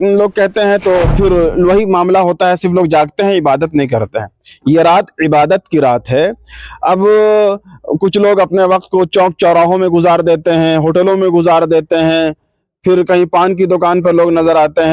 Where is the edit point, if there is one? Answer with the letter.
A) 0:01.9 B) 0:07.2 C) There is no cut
C